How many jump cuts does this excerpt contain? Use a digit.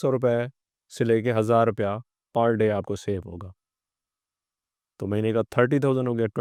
0